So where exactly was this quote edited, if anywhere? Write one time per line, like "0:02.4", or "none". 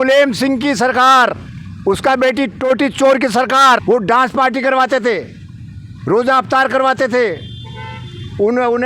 0:03.8